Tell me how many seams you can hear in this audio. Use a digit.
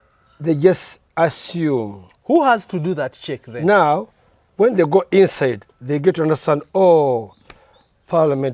0